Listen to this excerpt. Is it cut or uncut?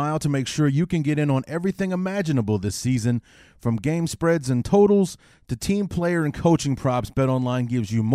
uncut